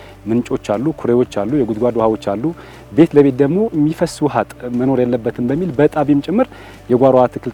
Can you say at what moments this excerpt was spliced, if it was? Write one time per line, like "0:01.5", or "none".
none